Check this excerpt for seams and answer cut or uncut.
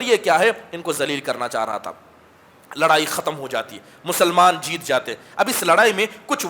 uncut